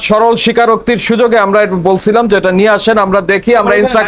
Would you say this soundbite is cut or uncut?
uncut